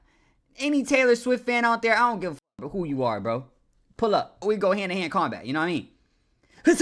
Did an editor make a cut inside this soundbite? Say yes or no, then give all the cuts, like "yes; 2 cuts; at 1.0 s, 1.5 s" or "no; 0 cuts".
no; 0 cuts